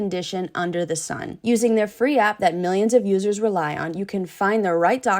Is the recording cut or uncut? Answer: cut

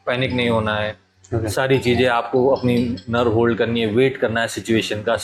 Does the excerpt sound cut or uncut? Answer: uncut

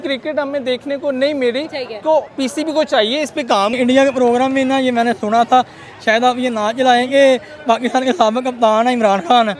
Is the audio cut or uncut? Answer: cut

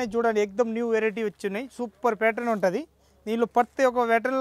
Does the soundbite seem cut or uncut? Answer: uncut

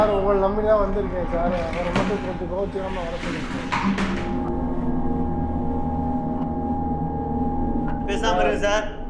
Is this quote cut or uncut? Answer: uncut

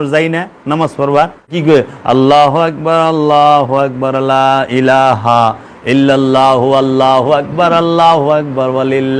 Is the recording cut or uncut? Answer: cut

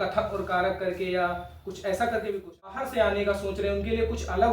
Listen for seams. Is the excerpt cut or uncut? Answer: cut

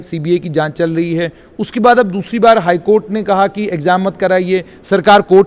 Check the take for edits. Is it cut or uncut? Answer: uncut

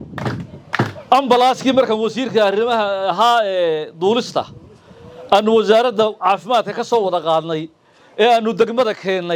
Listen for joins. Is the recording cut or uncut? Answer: uncut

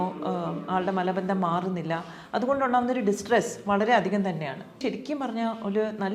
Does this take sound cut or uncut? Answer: cut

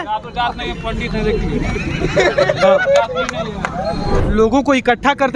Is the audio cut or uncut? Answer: cut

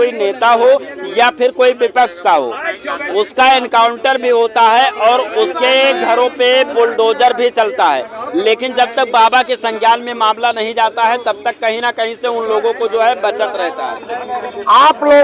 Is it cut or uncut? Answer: uncut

